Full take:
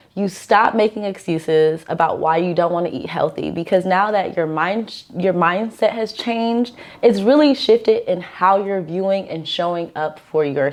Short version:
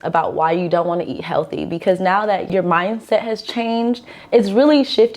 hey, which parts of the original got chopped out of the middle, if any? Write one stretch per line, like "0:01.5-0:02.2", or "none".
0:04.3-0:05.1

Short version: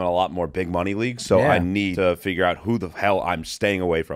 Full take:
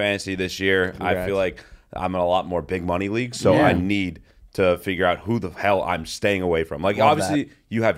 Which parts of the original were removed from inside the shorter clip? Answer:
0:04.1-0:04.5

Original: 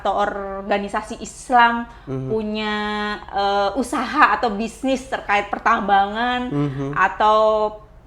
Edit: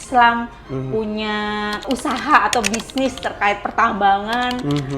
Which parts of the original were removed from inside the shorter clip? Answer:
0:03.2-0:03.7

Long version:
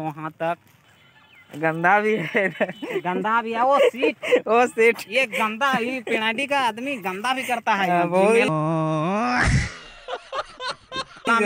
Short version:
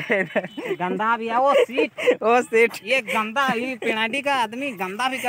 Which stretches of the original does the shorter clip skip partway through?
none

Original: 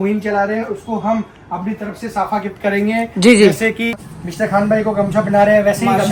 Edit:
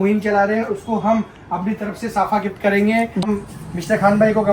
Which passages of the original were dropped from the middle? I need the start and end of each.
0:03.2-0:03.7

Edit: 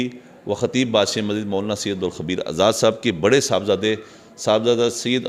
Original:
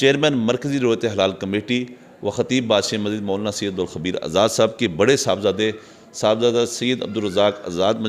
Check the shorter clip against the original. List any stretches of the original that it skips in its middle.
none

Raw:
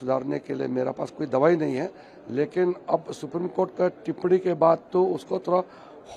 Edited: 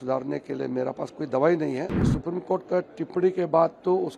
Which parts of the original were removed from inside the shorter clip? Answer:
0:02.1-0:03.2

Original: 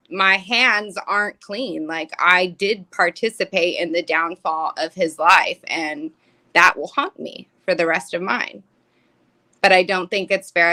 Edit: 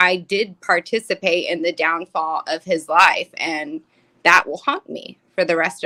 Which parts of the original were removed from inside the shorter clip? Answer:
none

